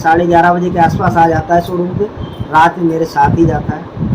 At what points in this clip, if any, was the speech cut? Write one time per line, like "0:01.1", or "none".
none